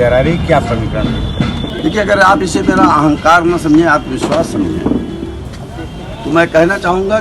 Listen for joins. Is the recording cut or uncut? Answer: cut